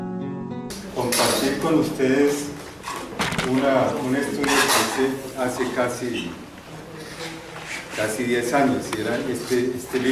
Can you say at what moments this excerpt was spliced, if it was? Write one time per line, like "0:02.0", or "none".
none